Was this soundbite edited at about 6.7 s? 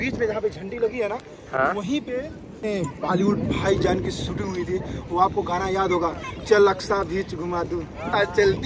no; 1 cut; at 2.6 s

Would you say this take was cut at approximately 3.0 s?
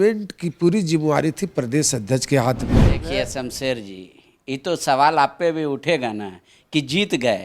yes; 1 cut; at 3.0 s

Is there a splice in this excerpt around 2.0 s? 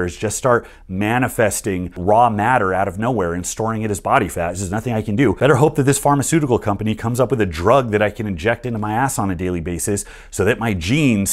yes; 2 cuts; at 2.0 s, 5.4 s

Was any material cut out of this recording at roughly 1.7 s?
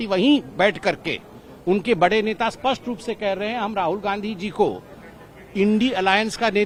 no; 0 cuts

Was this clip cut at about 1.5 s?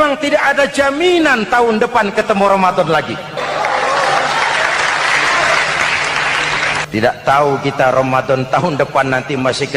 no; 2 cuts; at 3.4 s, 6.9 s

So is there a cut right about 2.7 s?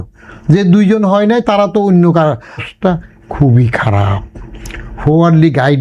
yes; 1 cut; at 2.7 s

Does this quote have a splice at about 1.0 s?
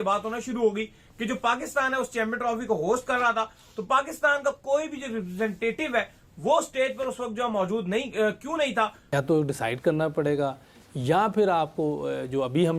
no; 1 cut; at 9.0 s

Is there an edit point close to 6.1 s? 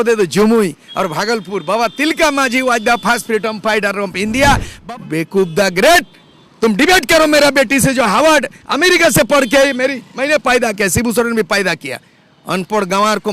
no; 1 cut; at 4.7 s

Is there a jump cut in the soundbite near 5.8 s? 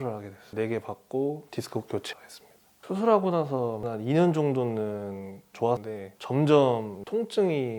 yes; 1 cut; at 5.8 s

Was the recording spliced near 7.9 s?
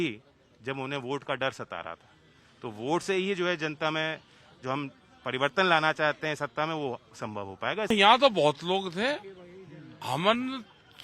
yes; 1 cut; at 7.9 s

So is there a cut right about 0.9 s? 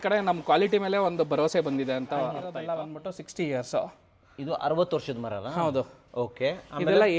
no; 1 cut; at 2.5 s

